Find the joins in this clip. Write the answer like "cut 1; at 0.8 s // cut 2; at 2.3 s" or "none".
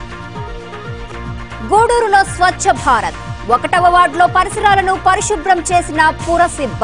cut 1; at 1.1 s